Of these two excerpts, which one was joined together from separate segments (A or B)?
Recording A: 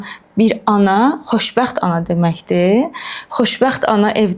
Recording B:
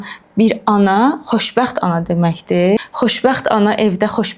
B